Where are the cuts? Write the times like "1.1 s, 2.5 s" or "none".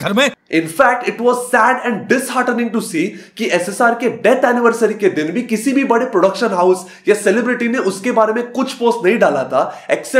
none